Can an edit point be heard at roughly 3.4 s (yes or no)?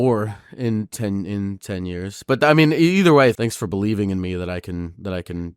yes